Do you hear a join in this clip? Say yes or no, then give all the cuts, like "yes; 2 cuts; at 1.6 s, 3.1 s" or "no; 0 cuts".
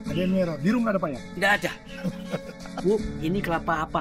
yes; 1 cut; at 2.6 s